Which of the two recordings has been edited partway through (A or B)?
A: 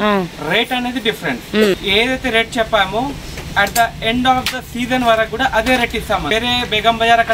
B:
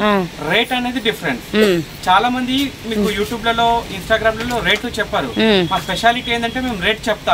A